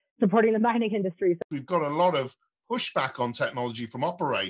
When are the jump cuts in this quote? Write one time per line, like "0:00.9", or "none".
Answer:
0:01.4